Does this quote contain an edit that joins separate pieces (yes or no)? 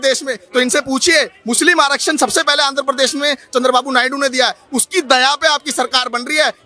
no